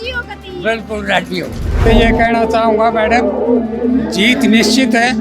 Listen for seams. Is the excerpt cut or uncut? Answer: cut